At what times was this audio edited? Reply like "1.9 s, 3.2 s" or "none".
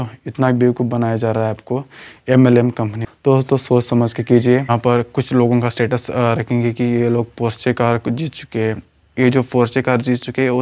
3.0 s, 4.7 s